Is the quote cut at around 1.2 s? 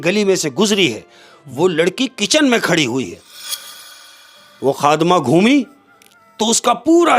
no; 1 cut; at 4.0 s

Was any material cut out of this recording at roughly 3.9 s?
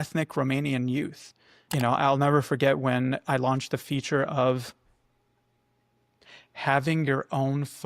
no; 1 cut; at 1.6 s

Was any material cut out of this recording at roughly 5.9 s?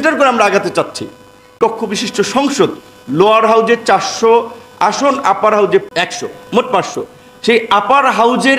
yes; 2 cuts; at 1.6 s, 5.9 s

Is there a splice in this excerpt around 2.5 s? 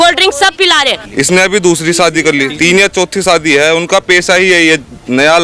yes; 2 cuts; at 1.0 s, 2.5 s

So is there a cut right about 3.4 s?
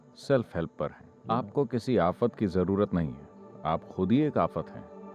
no; 1 cut; at 1.1 s

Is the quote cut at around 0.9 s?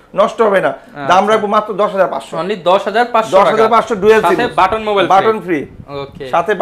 no; 0 cuts

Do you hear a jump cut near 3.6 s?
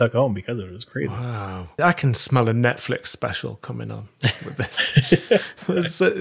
no; 1 cut; at 1.7 s

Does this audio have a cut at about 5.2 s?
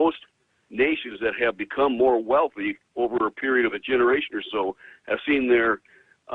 yes; 1 cut; at 5.2 s

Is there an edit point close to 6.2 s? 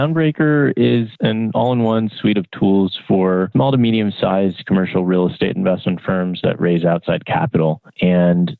no; 2 cuts; at 1.1 s, 3.5 s

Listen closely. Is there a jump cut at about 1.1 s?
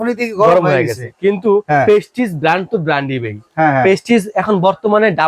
no; 0 cuts

